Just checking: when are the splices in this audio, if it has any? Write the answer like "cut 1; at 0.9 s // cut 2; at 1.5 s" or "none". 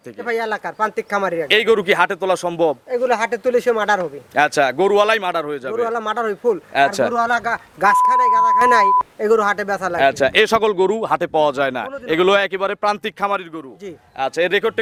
none